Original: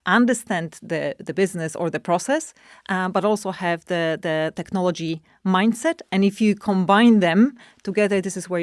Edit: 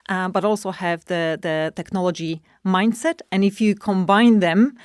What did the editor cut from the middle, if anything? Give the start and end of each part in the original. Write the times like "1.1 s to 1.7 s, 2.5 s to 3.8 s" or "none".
none

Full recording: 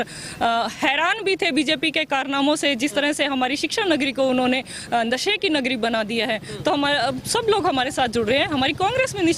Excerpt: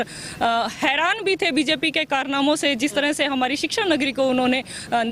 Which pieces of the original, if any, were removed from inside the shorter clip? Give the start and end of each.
none

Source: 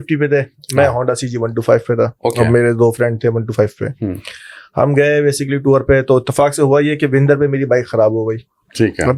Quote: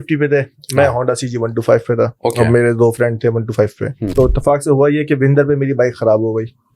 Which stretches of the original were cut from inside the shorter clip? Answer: 4.1 s to 6.0 s

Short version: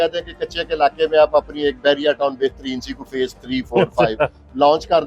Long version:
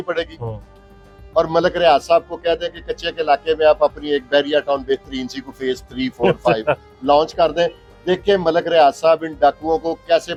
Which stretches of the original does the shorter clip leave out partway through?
none

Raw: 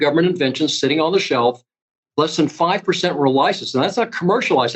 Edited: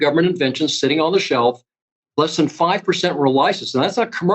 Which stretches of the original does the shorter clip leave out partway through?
none

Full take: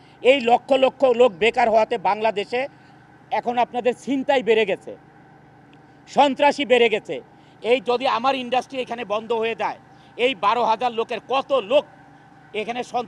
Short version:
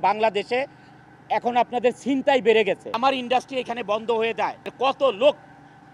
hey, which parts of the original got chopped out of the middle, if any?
5.0 s to 8.2 s, 9.9 s to 11.2 s

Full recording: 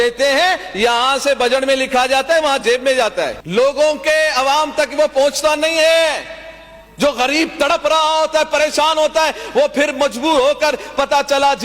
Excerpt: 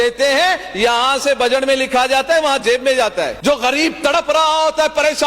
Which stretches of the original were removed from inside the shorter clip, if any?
3.3 s to 6.9 s

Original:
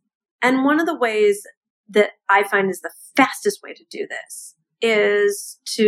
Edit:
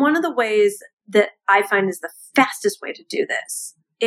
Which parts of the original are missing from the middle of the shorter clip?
1.6 s to 1.7 s

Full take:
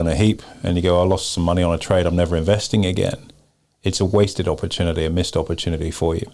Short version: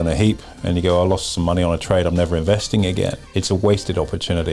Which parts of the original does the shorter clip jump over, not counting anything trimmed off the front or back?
3.2 s to 3.7 s

